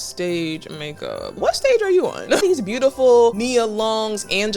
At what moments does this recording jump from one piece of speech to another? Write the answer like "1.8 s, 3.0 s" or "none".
1.3 s, 2.4 s, 3.4 s